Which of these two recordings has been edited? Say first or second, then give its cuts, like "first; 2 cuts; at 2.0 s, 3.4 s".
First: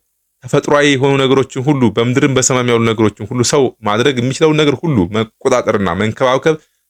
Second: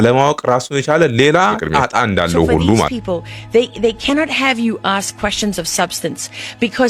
second; 1 cut; at 2.8 s